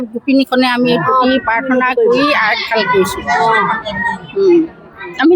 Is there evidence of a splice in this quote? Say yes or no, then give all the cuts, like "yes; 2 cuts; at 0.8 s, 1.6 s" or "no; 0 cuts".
no; 0 cuts